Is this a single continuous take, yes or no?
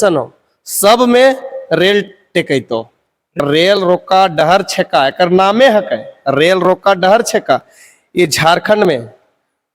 no